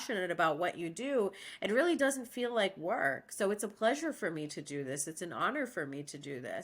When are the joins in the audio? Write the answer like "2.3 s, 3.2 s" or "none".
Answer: none